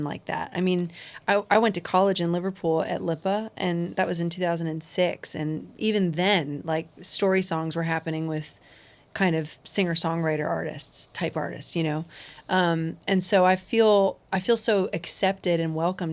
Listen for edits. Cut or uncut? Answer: uncut